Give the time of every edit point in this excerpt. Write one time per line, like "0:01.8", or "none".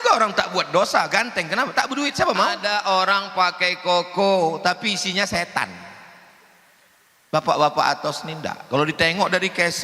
0:02.6

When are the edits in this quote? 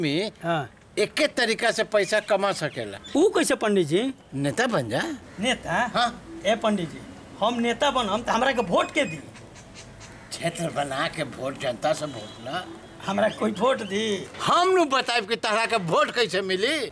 none

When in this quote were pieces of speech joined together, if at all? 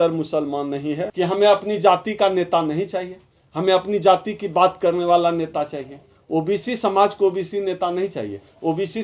0:01.1

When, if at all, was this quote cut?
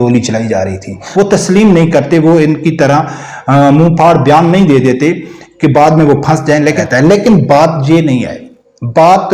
0:01.0
0:06.8

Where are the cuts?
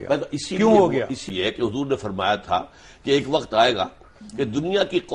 0:01.3

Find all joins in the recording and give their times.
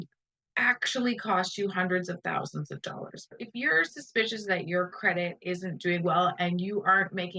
0:03.3

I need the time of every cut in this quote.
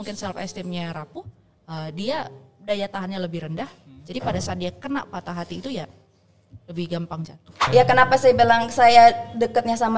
0:07.6

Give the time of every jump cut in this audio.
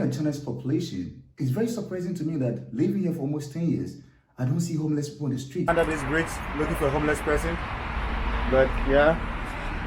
0:05.7

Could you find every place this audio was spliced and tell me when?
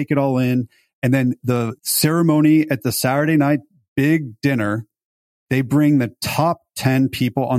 0:01.4

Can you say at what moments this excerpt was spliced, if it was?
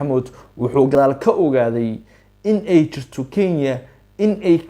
0:01.0

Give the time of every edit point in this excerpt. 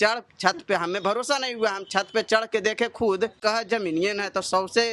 none

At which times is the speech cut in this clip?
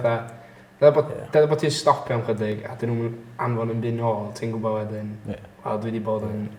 none

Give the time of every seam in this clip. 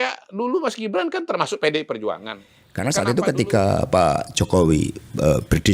0:02.8

